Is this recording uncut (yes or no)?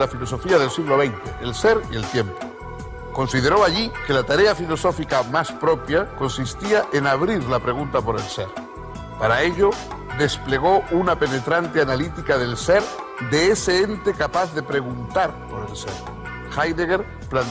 yes